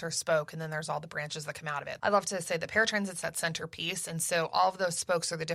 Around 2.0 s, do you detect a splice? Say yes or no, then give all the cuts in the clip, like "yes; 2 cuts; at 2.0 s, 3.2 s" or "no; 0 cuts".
yes; 1 cut; at 2.0 s